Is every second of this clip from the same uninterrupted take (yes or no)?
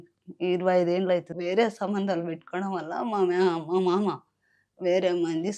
no